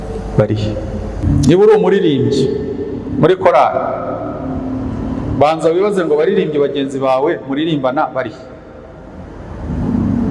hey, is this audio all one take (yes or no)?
no